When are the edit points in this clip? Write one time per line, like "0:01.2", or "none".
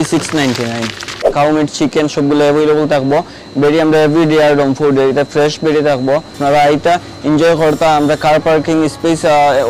0:01.3
0:06.3